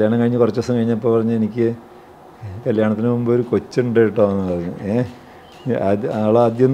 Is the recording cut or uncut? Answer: uncut